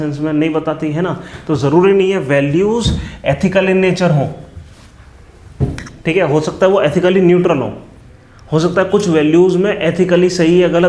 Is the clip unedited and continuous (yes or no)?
yes